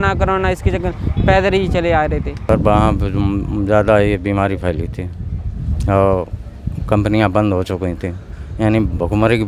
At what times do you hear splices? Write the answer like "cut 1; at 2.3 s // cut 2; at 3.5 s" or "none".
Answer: cut 1; at 2.4 s